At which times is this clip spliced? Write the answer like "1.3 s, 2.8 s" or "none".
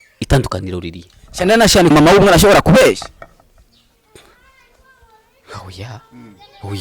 1.9 s